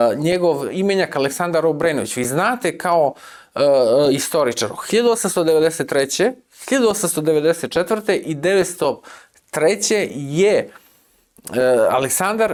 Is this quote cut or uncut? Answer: uncut